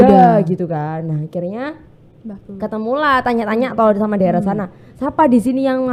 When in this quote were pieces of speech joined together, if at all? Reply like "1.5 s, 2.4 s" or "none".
none